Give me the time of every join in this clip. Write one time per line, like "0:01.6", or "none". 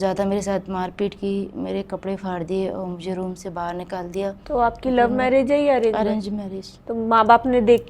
0:04.4